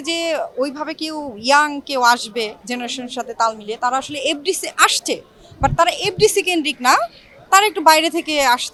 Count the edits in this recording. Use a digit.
0